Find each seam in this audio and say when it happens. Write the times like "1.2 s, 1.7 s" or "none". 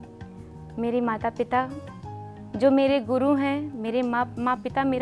none